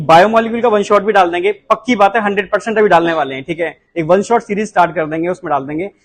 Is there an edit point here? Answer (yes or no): no